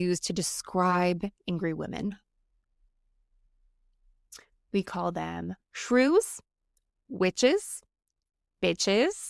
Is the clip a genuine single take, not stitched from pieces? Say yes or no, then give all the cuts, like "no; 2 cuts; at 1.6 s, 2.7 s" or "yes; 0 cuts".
yes; 0 cuts